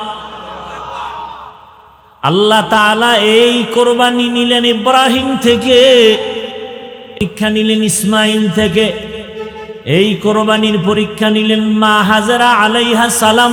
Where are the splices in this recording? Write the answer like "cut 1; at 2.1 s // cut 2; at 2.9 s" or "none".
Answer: none